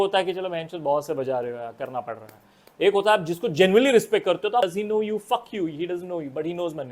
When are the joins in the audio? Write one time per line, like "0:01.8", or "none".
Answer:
0:04.6